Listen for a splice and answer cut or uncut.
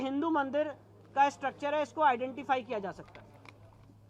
uncut